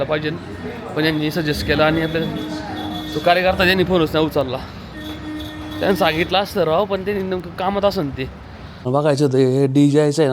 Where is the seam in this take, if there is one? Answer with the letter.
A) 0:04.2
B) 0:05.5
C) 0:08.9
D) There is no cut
C